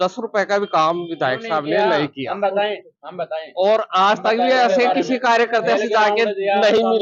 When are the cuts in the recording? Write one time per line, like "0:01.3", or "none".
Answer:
none